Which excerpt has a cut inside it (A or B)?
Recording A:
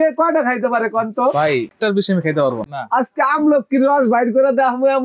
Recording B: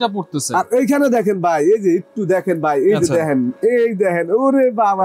A